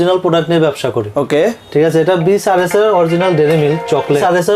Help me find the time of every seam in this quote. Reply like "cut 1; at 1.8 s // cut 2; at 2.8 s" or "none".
none